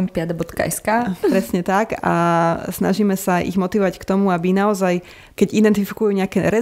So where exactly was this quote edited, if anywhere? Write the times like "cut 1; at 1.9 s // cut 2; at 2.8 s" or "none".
cut 1; at 5.2 s